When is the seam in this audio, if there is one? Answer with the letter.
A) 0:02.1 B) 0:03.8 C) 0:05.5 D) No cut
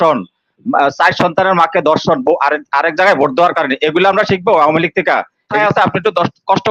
C